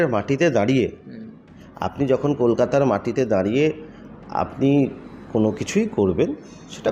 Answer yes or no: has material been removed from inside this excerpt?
no